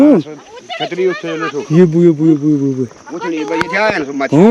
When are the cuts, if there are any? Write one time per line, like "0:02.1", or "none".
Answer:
none